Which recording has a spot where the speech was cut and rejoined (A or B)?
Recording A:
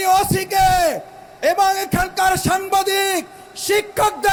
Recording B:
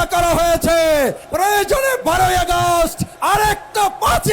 B